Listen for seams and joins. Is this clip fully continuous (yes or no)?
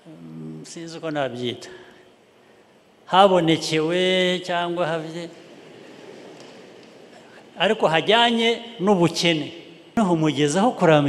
no